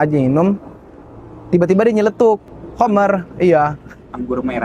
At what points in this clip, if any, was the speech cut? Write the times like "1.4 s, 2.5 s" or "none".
2.5 s